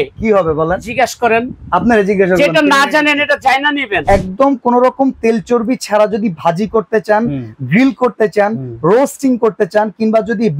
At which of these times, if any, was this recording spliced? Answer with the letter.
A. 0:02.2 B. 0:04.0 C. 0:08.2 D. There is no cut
B